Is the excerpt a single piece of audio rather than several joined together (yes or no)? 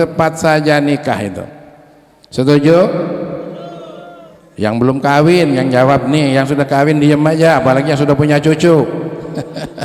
yes